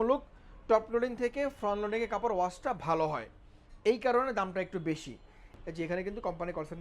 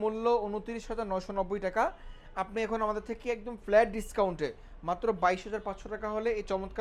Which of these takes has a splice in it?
first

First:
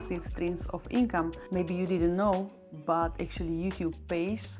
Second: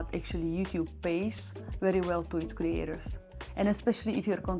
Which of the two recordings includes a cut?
first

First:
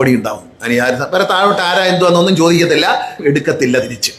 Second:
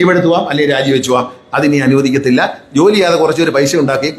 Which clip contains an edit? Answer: first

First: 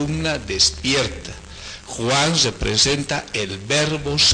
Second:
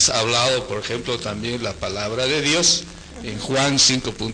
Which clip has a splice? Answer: first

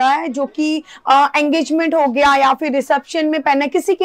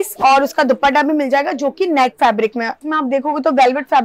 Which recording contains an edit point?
second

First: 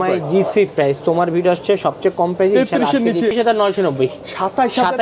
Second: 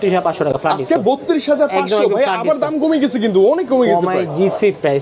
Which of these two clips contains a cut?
first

